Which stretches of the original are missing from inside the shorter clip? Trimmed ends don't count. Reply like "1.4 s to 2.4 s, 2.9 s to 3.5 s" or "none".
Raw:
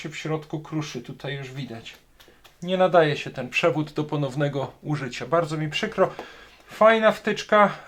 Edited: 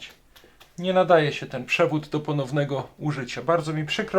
none